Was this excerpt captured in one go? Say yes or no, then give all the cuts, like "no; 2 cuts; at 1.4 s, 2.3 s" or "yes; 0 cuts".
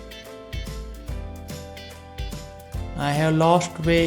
no; 1 cut; at 2.9 s